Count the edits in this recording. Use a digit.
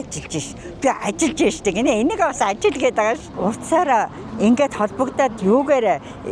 1